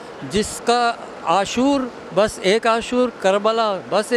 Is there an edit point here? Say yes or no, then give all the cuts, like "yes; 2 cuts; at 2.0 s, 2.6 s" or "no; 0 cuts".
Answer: no; 0 cuts